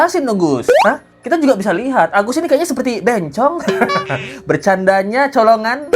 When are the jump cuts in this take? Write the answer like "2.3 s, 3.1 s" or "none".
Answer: none